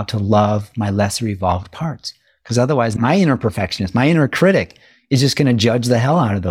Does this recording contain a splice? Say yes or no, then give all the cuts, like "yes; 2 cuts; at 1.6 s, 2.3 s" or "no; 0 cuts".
yes; 1 cut; at 3.0 s